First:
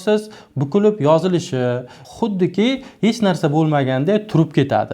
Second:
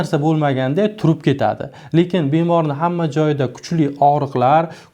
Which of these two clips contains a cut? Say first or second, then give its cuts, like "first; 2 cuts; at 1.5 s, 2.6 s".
first; 1 cut; at 1.9 s